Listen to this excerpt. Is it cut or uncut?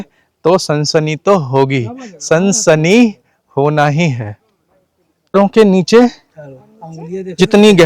uncut